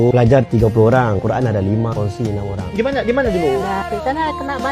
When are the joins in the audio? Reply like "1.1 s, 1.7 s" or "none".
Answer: none